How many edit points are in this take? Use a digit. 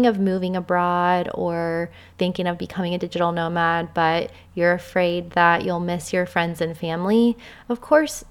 1